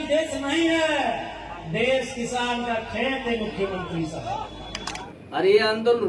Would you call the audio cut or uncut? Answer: cut